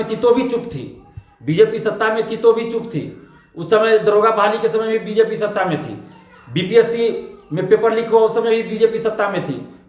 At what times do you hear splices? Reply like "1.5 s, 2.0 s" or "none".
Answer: none